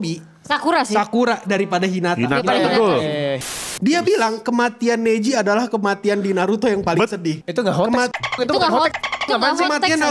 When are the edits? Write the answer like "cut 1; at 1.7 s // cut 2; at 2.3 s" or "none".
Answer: cut 1; at 3.4 s // cut 2; at 7.4 s